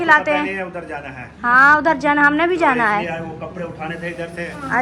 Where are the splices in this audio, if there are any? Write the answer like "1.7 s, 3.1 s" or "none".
none